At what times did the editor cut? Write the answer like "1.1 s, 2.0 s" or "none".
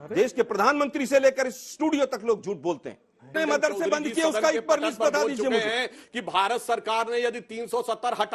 3.4 s